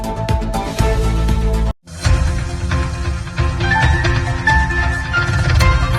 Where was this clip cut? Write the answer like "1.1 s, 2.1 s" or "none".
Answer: none